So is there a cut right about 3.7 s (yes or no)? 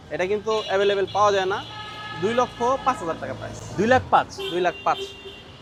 no